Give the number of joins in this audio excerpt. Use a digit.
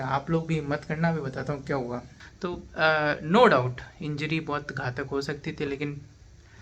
1